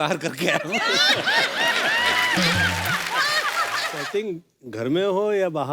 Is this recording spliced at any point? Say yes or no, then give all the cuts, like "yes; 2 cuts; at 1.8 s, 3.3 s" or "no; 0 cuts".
yes; 1 cut; at 4.1 s